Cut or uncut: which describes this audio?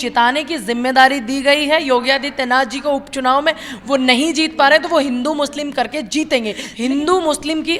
cut